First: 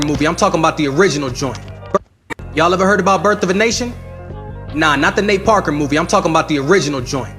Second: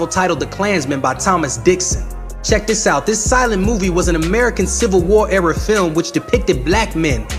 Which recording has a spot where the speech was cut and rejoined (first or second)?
first